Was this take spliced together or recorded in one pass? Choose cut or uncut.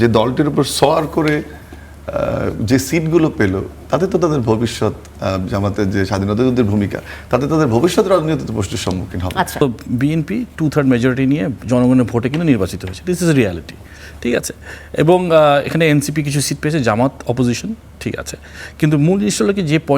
cut